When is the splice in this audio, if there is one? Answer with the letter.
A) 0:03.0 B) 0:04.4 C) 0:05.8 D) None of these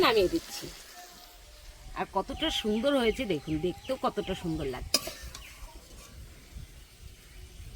C